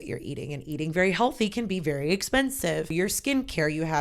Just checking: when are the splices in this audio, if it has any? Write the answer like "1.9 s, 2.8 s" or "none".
2.9 s